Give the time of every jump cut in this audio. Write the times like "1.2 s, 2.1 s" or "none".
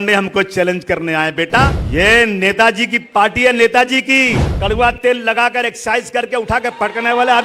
1.8 s, 4.5 s